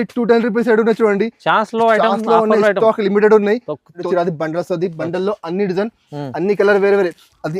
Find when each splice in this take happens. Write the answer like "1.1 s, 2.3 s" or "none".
4.0 s